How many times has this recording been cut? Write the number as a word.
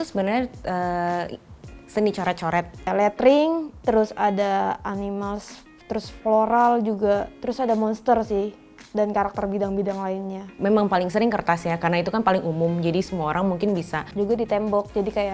two